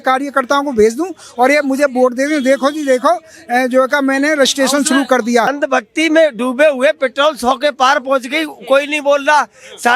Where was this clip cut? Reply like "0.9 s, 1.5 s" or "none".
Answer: 5.5 s